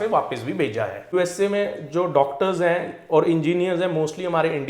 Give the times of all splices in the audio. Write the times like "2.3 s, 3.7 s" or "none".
1.1 s